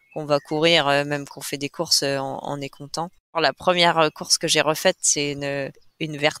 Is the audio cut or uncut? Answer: cut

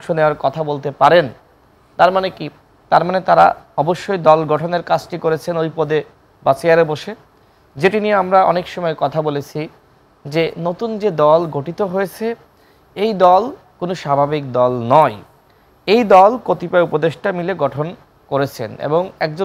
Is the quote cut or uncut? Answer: uncut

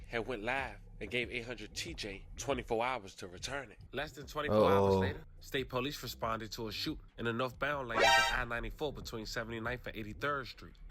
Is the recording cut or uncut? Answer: cut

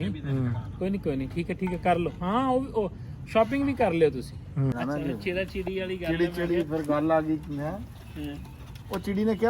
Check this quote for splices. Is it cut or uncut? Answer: cut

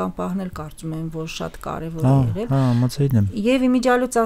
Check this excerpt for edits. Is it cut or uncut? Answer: uncut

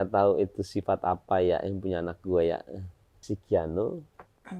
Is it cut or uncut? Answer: cut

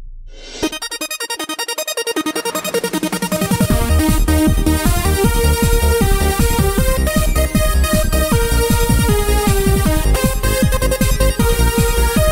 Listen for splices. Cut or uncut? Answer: cut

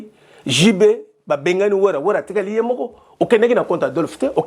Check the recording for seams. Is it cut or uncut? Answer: uncut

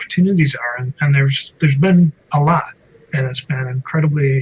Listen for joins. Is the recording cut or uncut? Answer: uncut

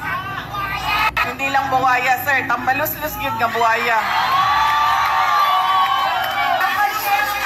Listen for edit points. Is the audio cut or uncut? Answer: cut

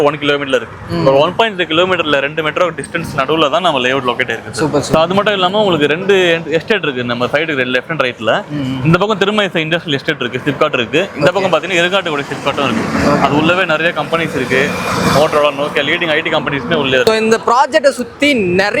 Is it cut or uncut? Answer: uncut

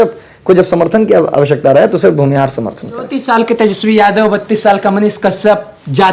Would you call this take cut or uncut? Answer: cut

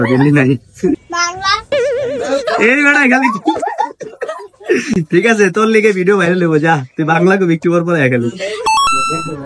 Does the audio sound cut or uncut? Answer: cut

